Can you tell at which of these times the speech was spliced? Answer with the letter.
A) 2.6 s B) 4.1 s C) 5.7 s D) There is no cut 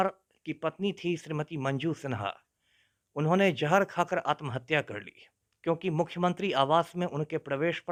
D